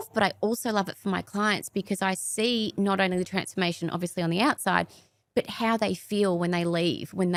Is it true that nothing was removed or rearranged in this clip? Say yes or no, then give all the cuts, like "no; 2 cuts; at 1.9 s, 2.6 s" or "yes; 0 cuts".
yes; 0 cuts